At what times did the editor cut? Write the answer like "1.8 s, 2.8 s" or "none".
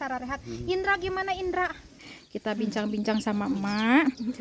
2.1 s